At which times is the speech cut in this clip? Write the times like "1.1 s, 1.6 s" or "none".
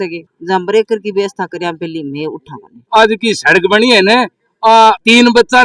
2.9 s